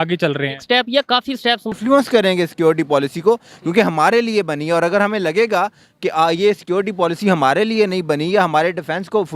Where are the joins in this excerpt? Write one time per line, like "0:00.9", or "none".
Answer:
0:01.7